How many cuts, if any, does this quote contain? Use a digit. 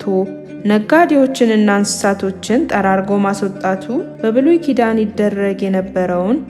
1